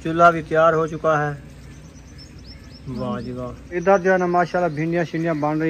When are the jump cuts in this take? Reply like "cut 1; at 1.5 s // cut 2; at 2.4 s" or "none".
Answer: cut 1; at 3.7 s